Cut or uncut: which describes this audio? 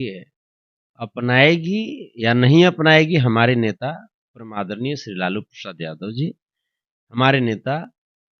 uncut